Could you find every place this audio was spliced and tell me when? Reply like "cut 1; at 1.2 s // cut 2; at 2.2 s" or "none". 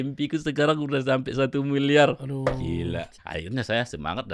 cut 1; at 3.2 s